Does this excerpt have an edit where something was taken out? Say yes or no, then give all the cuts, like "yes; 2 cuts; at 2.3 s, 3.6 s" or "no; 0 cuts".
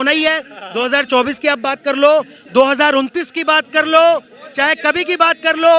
no; 0 cuts